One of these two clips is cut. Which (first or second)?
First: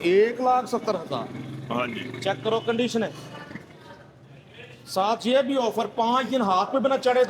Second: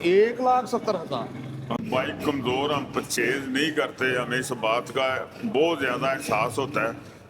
second